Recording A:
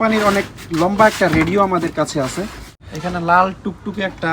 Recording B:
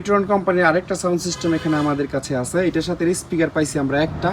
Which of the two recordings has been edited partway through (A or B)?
A